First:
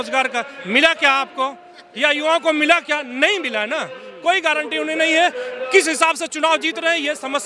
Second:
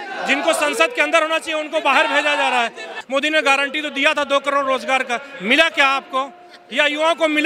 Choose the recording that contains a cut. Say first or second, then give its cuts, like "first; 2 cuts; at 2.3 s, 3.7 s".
second; 1 cut; at 2.9 s